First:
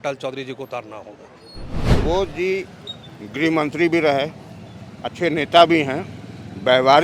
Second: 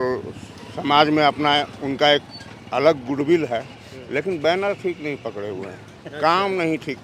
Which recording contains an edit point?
first; 1 cut; at 1.8 s

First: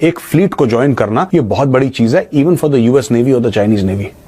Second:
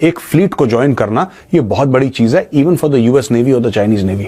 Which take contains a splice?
first; 1 cut; at 1.3 s

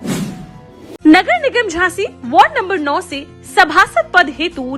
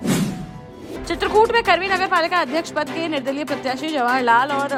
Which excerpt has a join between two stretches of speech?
first; 1 cut; at 0.9 s

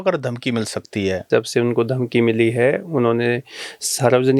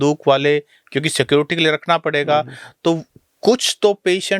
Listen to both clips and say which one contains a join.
first; 1 cut; at 1.3 s

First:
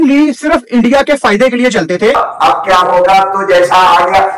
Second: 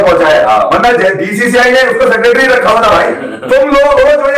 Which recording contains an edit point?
first; 1 cut; at 2.2 s

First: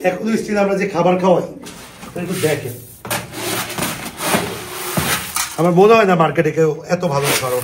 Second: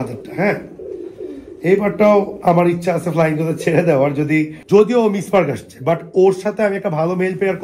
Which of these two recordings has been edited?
second; 1 cut; at 4.6 s

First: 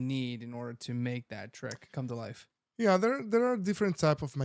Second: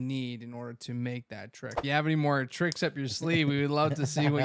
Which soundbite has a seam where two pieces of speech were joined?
second; 1 cut; at 1.8 s

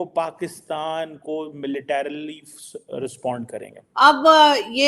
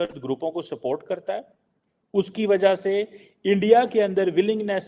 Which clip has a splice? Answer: first; 1 cut; at 3.8 s

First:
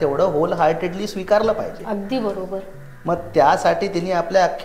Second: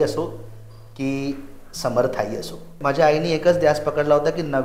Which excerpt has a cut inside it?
second; 1 cut; at 2.7 s

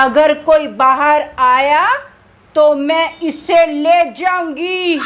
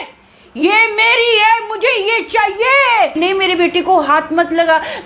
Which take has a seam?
second; 1 cut; at 3.2 s

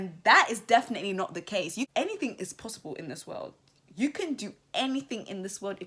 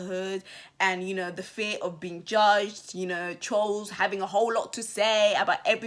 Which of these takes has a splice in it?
first; 1 cut; at 1.9 s

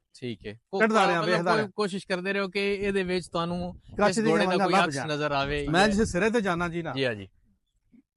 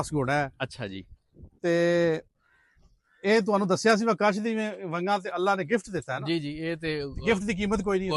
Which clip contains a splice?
first; 1 cut; at 5.6 s

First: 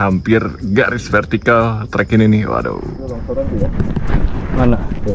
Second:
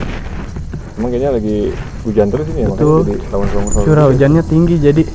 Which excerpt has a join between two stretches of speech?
first; 1 cut; at 3.1 s

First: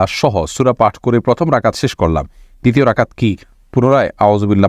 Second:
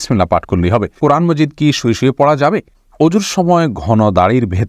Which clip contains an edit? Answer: second; 2 cuts; at 0.9 s, 2.8 s

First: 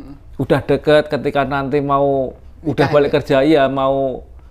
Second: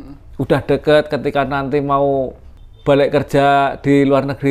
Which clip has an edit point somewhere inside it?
second; 1 cut; at 2.5 s

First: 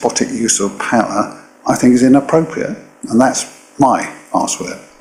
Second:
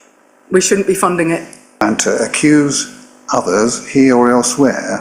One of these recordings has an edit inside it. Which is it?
second; 1 cut; at 1.8 s

